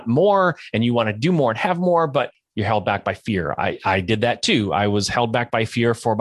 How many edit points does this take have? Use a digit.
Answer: 1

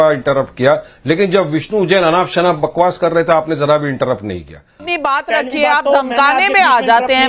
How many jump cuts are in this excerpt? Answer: 1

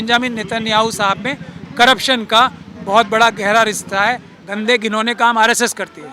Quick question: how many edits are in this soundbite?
1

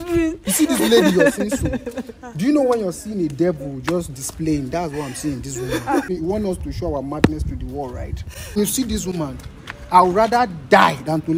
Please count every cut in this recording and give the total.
2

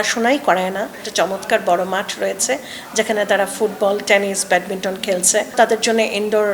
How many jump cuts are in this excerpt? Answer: 2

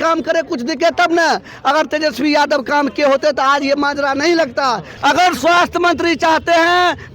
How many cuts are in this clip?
1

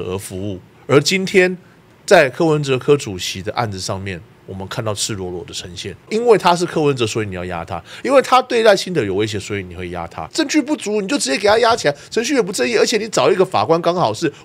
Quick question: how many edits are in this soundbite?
2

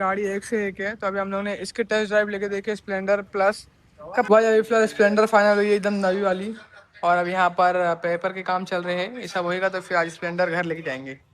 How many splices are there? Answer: 1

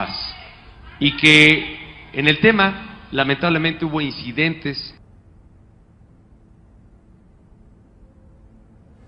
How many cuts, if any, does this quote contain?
1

